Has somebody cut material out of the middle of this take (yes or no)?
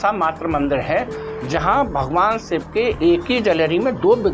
no